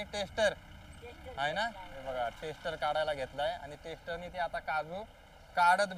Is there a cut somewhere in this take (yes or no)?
no